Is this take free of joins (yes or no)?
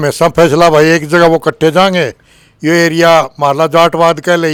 yes